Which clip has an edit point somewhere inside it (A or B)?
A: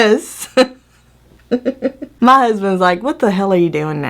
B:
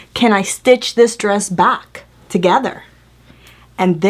A